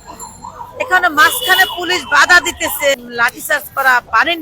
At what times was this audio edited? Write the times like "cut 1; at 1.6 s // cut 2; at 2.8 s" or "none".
cut 1; at 3.0 s